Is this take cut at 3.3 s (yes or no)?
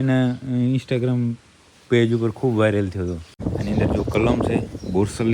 yes